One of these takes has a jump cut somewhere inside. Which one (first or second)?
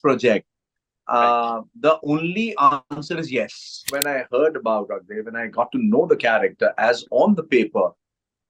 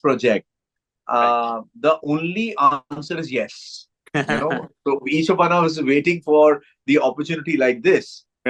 first